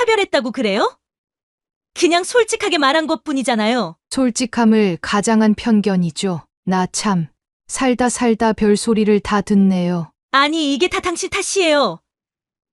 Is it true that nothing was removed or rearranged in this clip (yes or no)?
no